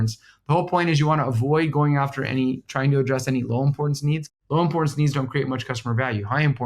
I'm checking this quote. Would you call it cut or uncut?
cut